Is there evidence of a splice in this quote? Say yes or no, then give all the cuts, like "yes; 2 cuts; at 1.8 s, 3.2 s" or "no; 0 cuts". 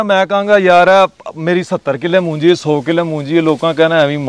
no; 0 cuts